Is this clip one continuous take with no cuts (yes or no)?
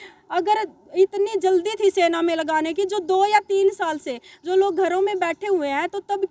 yes